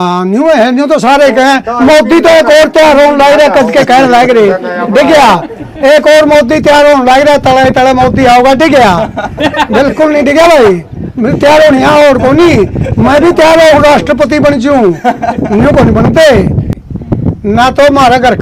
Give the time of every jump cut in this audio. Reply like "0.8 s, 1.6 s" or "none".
16.5 s